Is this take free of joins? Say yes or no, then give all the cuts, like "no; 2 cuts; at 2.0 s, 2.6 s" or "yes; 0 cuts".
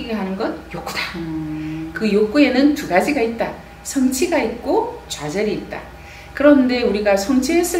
yes; 0 cuts